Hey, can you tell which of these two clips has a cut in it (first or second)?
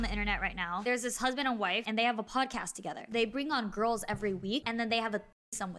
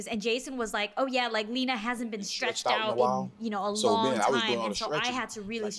first